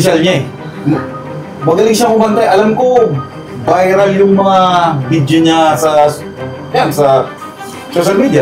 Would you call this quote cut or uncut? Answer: uncut